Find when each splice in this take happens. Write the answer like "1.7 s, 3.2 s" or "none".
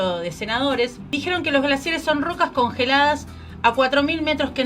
1.1 s